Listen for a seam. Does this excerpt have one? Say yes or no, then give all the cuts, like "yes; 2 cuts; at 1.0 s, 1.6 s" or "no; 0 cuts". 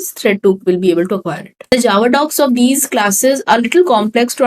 yes; 1 cut; at 1.5 s